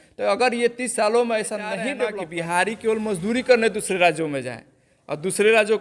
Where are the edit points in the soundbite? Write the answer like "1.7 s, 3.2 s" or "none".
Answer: 2.1 s